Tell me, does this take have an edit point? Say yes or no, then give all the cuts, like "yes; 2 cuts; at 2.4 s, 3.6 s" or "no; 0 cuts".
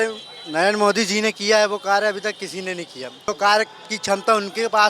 yes; 1 cut; at 3.3 s